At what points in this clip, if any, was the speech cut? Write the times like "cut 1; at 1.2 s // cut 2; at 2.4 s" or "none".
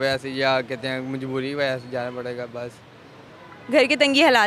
none